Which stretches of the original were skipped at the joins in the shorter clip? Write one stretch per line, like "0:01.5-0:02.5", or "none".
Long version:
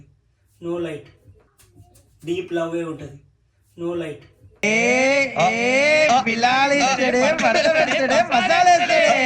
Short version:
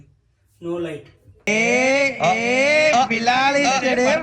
0:01.2-0:04.4